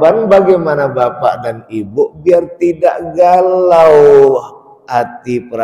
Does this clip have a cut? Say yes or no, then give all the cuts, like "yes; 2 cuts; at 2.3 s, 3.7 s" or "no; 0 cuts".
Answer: no; 0 cuts